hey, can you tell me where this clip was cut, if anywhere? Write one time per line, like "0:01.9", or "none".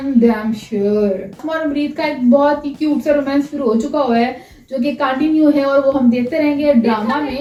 none